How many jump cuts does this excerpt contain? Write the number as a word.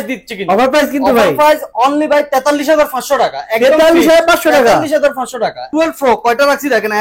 one